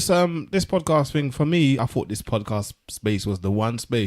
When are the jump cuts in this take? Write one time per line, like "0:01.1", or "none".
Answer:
0:01.8